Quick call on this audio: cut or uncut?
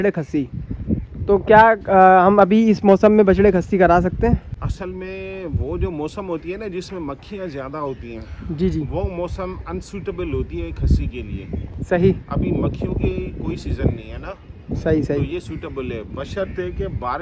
uncut